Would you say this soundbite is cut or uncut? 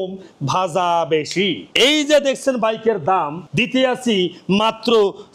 uncut